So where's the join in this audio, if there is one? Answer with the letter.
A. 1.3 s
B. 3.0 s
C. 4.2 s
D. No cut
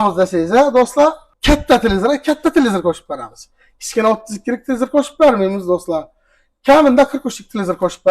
A